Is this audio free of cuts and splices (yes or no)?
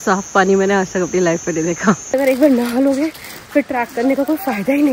no